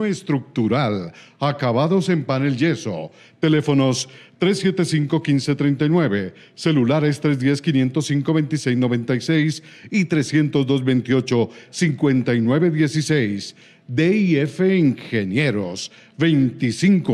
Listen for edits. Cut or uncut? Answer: uncut